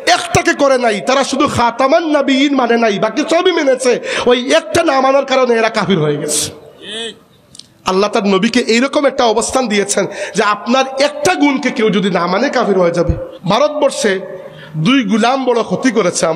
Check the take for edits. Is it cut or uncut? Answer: cut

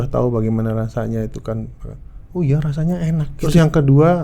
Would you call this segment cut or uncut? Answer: cut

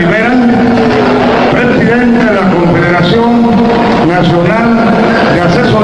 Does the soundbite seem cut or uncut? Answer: uncut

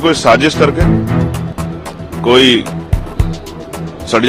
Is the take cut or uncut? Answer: uncut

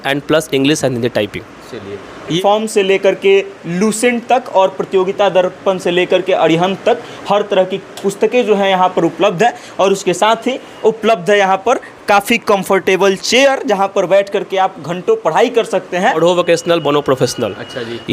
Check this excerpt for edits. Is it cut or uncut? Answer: cut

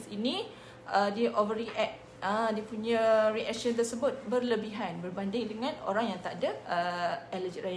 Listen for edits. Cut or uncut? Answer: cut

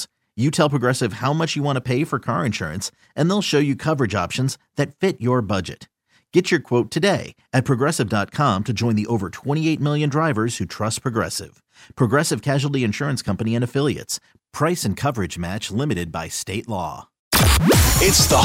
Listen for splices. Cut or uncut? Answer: cut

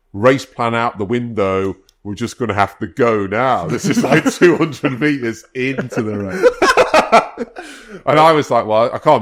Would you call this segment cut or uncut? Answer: uncut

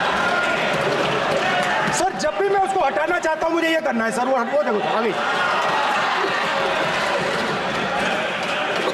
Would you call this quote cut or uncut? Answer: uncut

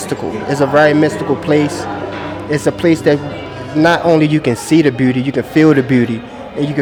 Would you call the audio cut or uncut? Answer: uncut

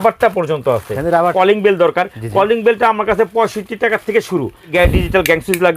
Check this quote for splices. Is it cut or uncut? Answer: cut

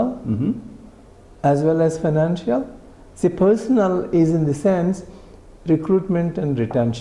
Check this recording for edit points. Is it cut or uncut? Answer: uncut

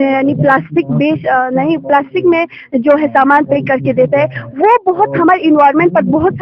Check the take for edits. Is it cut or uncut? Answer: uncut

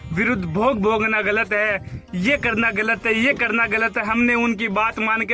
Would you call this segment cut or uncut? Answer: uncut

